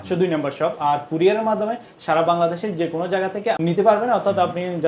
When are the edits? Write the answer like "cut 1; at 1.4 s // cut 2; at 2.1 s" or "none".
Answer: cut 1; at 3.6 s